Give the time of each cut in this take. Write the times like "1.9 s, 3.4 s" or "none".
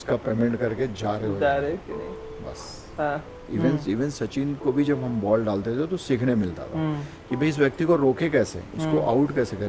3.4 s